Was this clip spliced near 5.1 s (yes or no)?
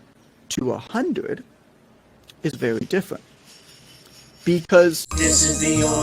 yes